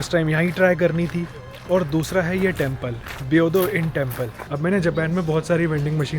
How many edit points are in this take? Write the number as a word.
one